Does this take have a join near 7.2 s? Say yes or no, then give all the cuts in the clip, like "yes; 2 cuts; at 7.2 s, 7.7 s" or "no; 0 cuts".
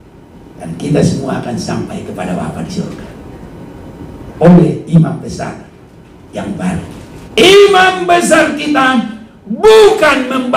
yes; 1 cut; at 7.2 s